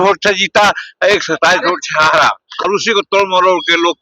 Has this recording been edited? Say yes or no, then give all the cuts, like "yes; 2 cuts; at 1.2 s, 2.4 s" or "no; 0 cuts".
yes; 1 cut; at 2.7 s